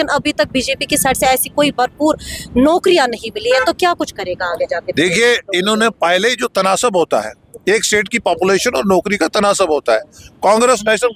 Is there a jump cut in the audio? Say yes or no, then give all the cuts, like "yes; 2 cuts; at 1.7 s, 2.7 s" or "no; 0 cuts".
no; 0 cuts